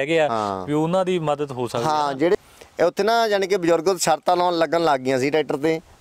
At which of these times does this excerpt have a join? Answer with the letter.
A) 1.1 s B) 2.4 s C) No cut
B